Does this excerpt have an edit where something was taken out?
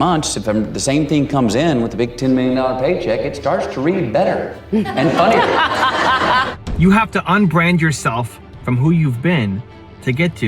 yes; 1 cut; at 6.5 s

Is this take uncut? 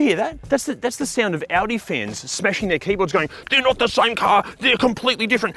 yes; 0 cuts

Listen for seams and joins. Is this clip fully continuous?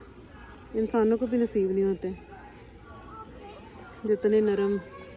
yes; 0 cuts

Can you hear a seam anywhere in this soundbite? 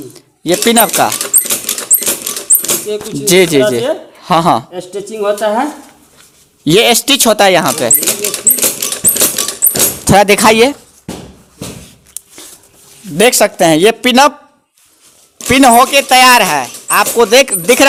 no; 0 cuts

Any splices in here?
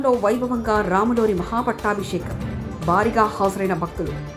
no; 0 cuts

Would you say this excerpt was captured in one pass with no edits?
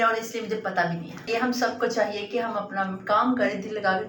no; 1 cut; at 1.3 s

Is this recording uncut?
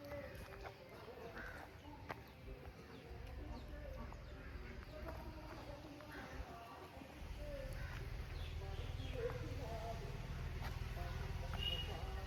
yes; 0 cuts

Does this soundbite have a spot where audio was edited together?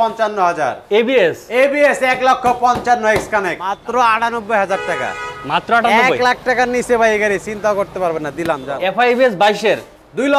yes; 2 cuts; at 3.7 s, 8.7 s

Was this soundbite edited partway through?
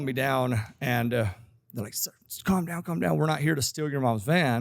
no; 0 cuts

